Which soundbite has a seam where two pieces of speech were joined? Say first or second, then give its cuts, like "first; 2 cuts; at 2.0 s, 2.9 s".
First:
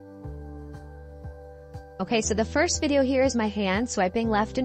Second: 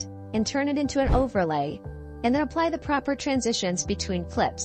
first; 1 cut; at 1.8 s